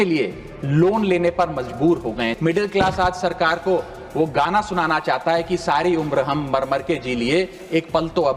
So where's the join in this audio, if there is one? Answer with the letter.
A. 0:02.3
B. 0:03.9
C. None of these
A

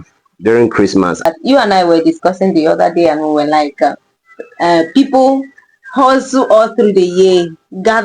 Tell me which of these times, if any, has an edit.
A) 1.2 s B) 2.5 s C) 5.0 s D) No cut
A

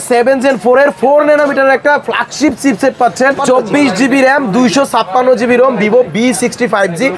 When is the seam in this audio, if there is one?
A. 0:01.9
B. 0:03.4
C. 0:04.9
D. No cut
B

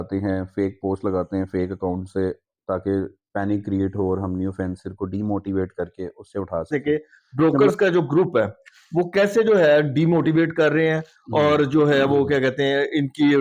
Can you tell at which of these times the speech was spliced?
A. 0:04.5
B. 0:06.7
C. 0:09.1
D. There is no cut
B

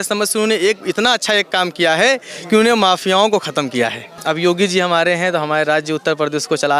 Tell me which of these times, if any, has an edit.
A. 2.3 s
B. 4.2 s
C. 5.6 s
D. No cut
B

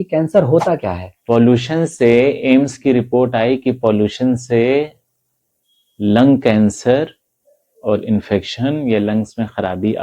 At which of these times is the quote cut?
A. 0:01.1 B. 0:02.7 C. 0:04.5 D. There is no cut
A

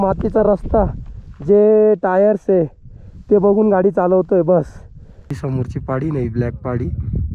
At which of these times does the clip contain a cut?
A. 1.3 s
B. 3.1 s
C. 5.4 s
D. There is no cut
C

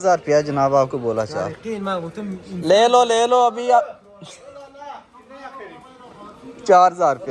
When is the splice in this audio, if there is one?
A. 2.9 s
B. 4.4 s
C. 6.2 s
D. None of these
D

